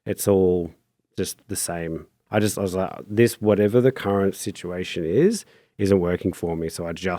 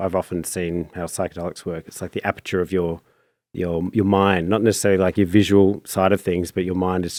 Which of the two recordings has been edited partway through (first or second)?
first